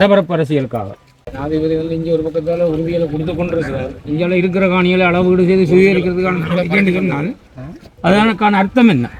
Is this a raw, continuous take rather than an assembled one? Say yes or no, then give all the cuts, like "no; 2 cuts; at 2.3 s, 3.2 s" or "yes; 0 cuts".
no; 1 cut; at 1.3 s